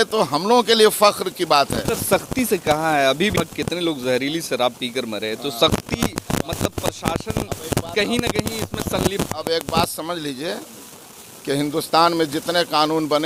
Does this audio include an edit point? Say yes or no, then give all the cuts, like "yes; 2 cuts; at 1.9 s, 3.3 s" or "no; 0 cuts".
no; 0 cuts